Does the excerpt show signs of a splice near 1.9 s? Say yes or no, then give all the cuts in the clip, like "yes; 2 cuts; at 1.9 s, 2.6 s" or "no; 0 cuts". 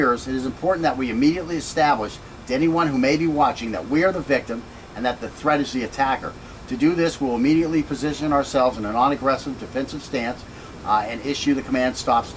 no; 1 cut; at 9.4 s